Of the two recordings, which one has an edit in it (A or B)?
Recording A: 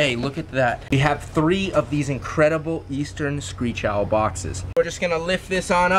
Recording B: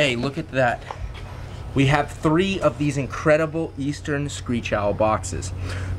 A